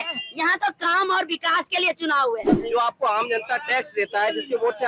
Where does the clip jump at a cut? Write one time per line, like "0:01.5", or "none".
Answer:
0:02.5